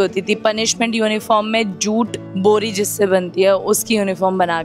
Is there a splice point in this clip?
no; 0 cuts

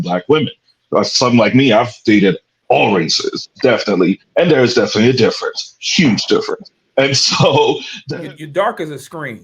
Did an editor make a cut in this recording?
yes; 1 cut; at 7.9 s

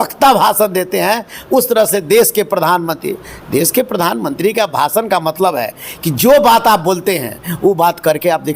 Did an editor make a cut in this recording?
no; 0 cuts

